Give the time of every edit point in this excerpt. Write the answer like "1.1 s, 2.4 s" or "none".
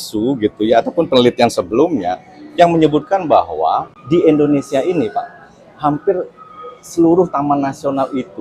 3.9 s